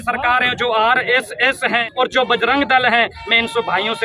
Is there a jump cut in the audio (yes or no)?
yes